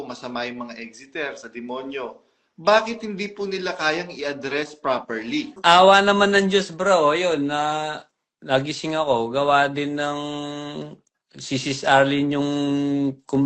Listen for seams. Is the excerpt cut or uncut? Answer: cut